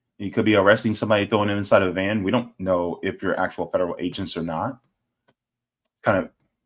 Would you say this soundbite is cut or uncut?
uncut